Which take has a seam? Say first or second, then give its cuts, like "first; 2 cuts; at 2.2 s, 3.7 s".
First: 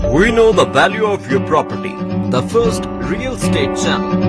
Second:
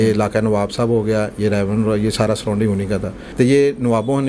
second; 1 cut; at 3.2 s